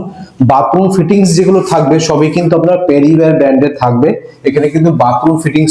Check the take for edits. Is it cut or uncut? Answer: uncut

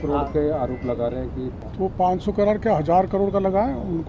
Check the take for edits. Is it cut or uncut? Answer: cut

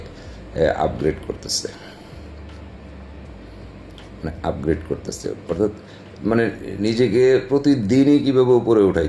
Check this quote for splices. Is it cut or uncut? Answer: uncut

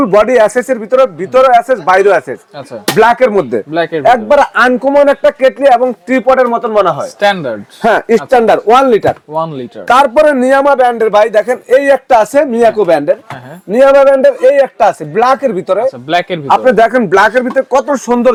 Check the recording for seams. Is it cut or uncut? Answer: uncut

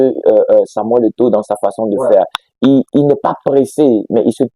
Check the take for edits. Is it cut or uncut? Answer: uncut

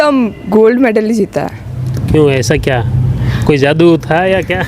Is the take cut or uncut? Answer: uncut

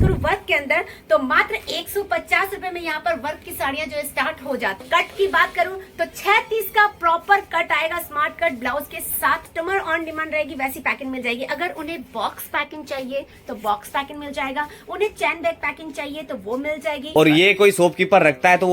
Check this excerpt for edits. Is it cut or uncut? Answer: cut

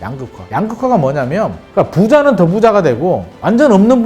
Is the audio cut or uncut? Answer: cut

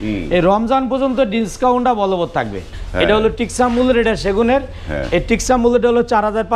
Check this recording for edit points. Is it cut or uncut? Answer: cut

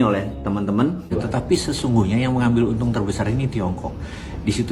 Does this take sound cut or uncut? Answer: cut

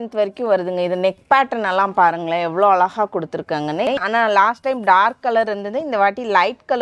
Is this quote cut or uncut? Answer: cut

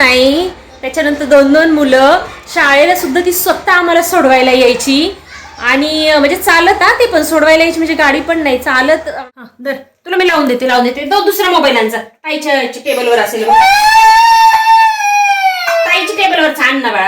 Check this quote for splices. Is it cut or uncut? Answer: cut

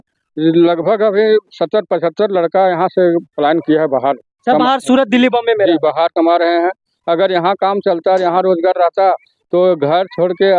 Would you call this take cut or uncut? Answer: uncut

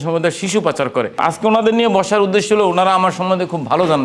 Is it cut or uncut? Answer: cut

